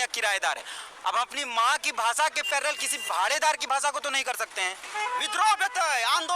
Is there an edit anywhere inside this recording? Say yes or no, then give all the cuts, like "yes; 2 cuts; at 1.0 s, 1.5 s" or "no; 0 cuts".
yes; 1 cut; at 4.8 s